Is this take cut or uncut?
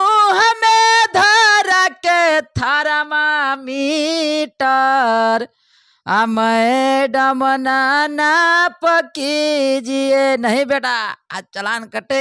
uncut